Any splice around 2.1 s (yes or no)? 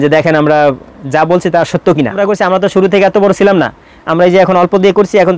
yes